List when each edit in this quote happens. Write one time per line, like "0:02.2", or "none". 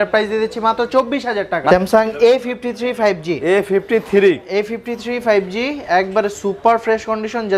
0:01.7